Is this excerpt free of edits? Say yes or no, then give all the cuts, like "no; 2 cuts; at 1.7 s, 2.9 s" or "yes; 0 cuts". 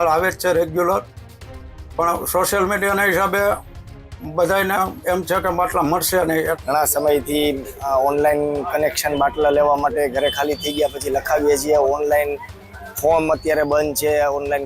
no; 1 cut; at 6.6 s